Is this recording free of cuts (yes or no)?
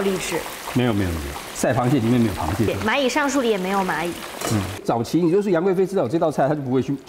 no